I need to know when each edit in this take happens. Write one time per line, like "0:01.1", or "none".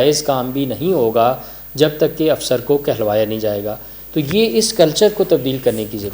none